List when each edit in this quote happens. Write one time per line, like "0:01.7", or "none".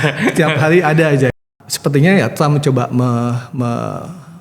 0:01.4

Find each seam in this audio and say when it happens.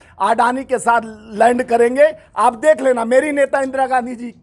none

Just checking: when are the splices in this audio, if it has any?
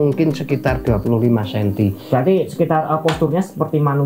none

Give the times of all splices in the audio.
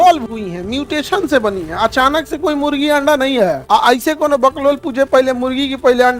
0:03.6

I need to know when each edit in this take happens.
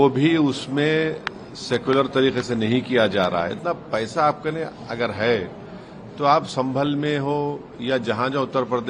0:03.6

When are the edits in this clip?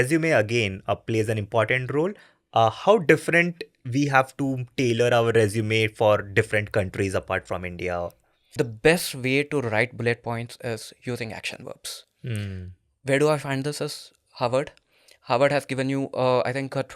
0:08.5

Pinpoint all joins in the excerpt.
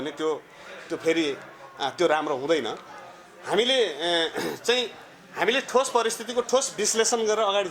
none

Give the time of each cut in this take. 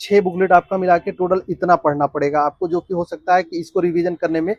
none

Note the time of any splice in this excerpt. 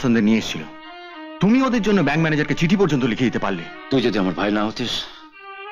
0:03.7

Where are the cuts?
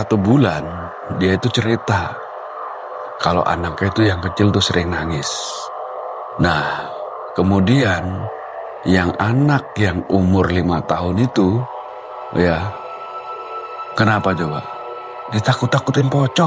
none

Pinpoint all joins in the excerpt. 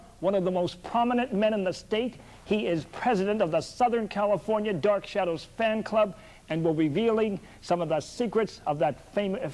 0:03.9

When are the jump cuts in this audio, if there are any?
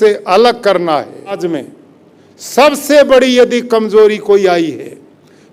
0:01.4

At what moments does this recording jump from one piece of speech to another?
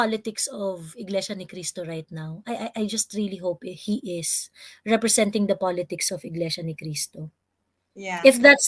none

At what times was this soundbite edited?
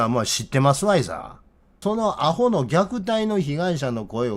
0:01.7

